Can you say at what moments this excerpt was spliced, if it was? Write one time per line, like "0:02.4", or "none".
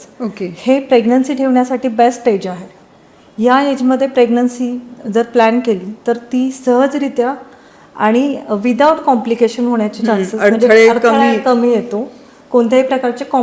none